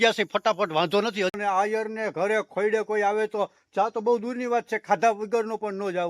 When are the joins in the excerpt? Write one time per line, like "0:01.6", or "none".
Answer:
0:01.3